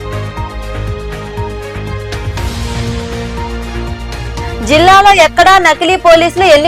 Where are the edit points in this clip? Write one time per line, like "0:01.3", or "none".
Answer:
0:02.2